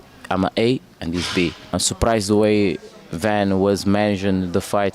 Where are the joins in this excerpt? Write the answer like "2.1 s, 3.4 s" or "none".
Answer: 1.7 s